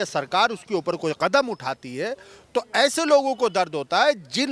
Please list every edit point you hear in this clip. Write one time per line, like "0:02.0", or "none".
none